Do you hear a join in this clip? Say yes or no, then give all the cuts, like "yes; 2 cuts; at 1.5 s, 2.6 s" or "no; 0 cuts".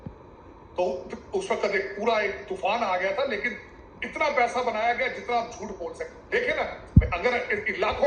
yes; 1 cut; at 6.0 s